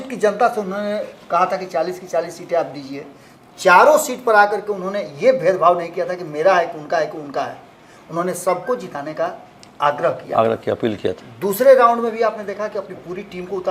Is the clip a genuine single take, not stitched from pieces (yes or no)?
yes